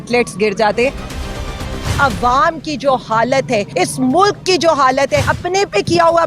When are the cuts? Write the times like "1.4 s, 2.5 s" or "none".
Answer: 1.5 s, 3.7 s, 5.3 s